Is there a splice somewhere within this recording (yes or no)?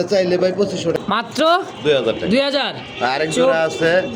yes